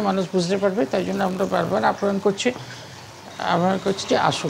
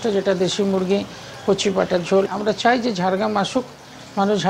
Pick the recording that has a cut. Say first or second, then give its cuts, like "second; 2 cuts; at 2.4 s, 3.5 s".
second; 1 cut; at 2.3 s